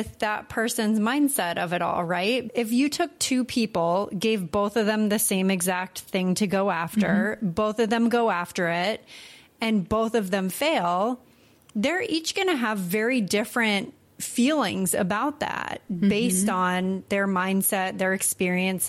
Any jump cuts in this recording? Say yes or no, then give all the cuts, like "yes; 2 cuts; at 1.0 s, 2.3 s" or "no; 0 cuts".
yes; 1 cut; at 2.4 s